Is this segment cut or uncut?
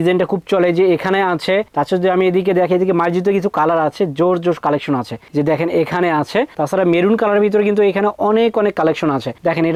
uncut